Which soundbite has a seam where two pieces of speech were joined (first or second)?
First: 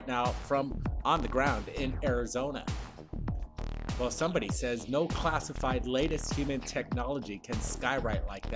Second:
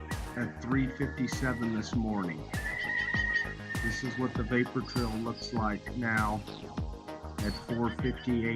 first